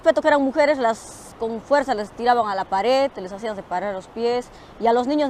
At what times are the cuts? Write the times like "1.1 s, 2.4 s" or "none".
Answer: 1.2 s